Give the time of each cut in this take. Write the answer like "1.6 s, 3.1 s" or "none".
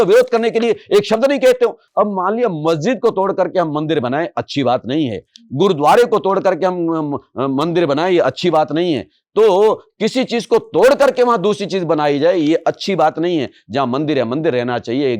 1.8 s